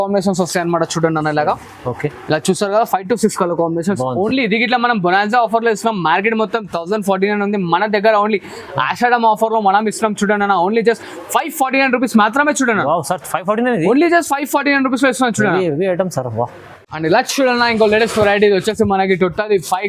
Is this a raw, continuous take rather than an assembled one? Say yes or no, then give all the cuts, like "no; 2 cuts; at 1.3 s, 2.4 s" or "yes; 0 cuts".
yes; 0 cuts